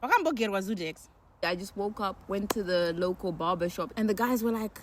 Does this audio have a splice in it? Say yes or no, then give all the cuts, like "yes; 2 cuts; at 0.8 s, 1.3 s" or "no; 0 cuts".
yes; 2 cuts; at 1.4 s, 3.9 s